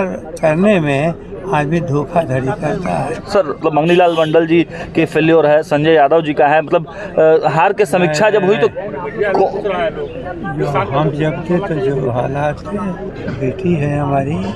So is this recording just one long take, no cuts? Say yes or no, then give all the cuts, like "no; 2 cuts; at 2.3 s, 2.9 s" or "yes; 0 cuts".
no; 2 cuts; at 3.6 s, 13.1 s